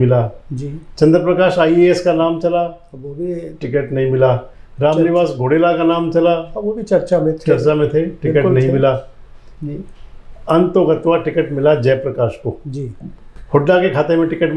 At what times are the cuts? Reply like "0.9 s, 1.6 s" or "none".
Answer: none